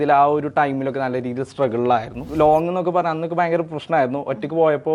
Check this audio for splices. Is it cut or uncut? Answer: cut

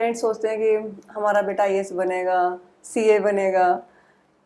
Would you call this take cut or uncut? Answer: uncut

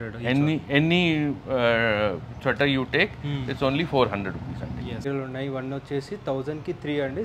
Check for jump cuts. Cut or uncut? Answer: cut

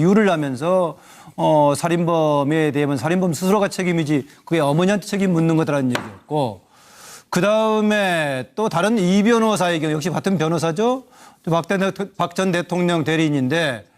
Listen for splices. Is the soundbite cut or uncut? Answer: cut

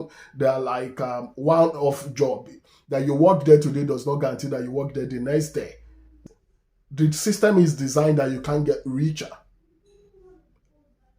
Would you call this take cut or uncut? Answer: cut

